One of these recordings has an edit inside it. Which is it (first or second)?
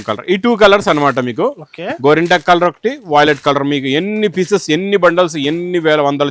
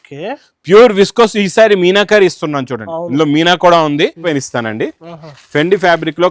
second